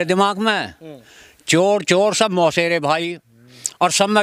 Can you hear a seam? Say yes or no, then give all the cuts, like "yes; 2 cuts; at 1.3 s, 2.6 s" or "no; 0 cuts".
no; 0 cuts